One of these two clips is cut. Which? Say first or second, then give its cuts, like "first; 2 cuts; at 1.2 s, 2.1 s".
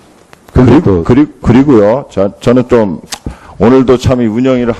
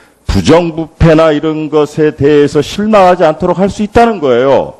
first; 1 cut; at 2.9 s